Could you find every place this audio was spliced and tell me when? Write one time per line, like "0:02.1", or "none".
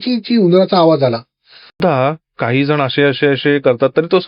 0:01.8